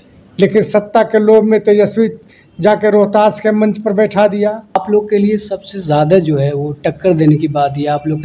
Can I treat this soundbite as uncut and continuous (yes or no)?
no